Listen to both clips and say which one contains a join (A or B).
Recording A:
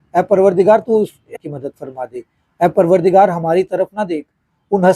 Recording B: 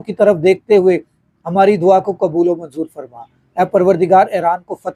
A